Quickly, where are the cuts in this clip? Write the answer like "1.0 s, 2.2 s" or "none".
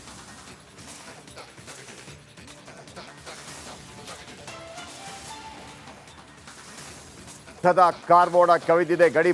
7.6 s